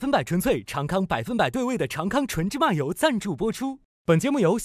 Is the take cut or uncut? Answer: uncut